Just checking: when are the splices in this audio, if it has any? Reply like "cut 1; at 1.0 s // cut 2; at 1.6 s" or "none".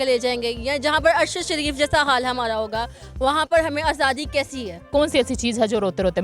cut 1; at 4.8 s